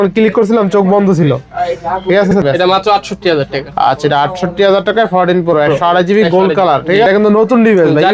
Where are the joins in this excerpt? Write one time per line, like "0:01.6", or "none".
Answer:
0:02.4
0:07.0